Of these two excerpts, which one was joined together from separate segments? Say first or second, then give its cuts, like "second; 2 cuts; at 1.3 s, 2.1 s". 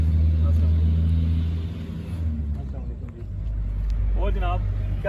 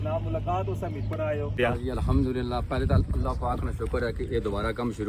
second; 1 cut; at 1.6 s